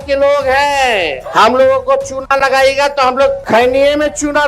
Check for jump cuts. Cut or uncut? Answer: cut